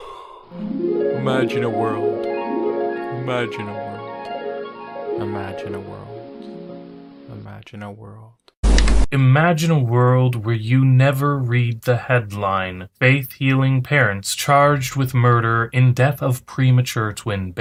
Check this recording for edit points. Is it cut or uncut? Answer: uncut